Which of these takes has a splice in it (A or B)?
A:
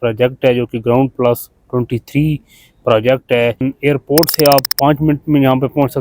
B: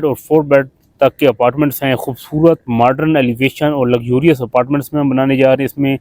A